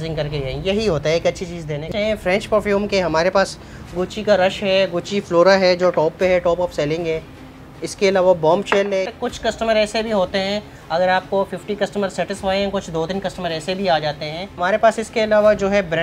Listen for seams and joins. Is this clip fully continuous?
no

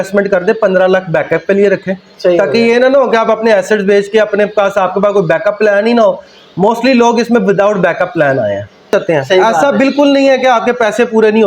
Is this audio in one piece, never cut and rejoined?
no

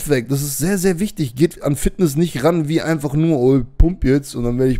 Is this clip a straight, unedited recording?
yes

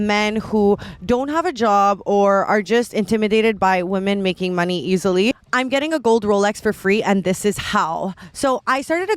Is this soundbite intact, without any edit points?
no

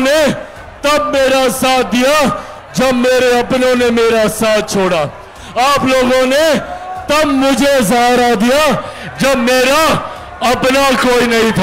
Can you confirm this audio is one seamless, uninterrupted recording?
yes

